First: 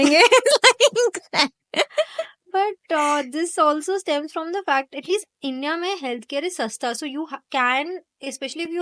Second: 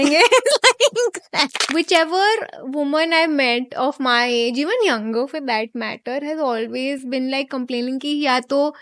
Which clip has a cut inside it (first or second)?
second